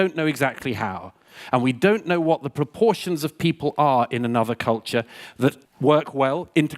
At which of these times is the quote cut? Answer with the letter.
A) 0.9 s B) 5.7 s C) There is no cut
B